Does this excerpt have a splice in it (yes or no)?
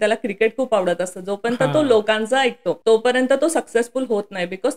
yes